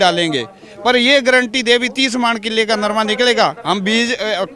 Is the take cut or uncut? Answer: uncut